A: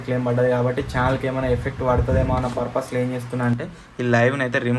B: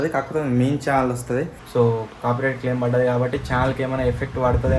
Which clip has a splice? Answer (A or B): B